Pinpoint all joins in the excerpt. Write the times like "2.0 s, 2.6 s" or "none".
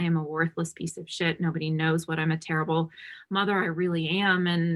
none